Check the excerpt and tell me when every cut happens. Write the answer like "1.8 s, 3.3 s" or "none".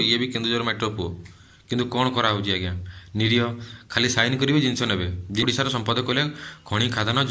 5.4 s